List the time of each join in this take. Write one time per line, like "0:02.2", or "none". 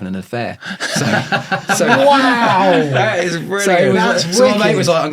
none